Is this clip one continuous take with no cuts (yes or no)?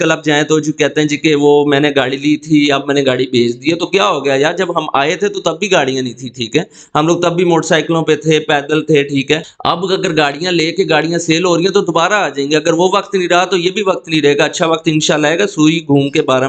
no